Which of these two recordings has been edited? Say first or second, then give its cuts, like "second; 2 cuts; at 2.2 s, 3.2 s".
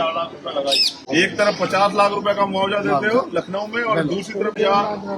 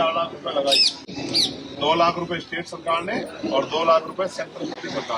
first; 1 cut; at 1.0 s